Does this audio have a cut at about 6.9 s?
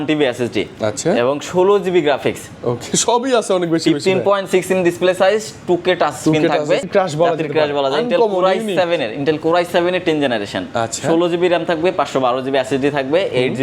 yes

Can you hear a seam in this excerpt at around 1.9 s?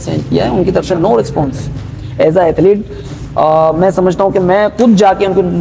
no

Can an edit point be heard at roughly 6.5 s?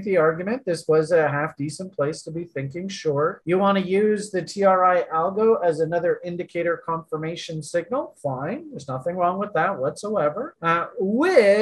no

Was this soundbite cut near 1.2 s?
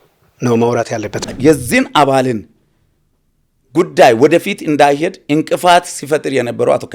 yes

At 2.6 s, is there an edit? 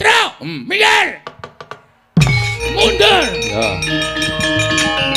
yes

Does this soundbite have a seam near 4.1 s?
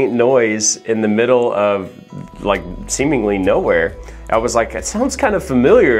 yes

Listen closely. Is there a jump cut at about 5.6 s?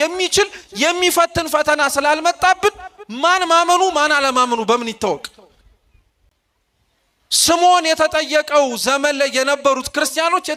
no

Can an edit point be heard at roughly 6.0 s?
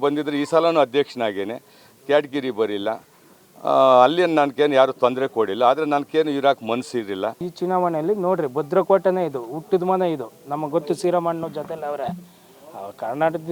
no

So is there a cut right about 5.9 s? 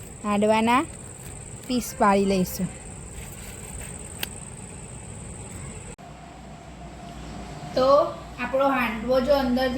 yes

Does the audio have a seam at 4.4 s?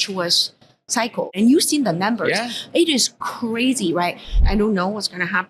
yes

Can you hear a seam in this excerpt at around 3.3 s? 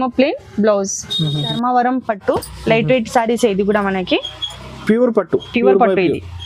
no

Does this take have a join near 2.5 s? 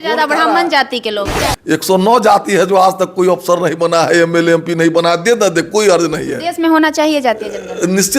no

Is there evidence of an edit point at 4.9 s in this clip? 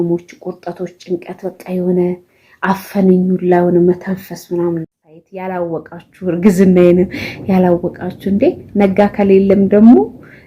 yes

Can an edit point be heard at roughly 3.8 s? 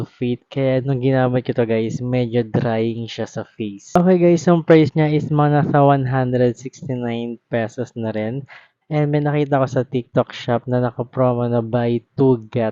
yes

